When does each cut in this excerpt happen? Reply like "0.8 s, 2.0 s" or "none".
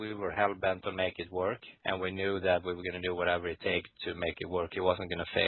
none